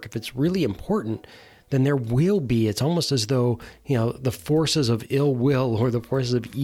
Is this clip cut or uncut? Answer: uncut